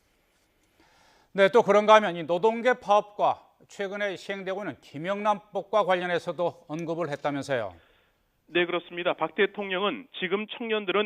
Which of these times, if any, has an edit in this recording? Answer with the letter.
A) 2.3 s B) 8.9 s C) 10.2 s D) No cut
C